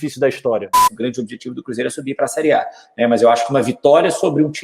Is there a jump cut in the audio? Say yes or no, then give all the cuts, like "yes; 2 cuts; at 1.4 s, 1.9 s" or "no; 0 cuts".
yes; 1 cut; at 0.9 s